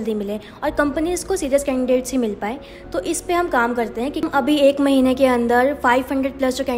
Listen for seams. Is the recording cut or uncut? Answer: cut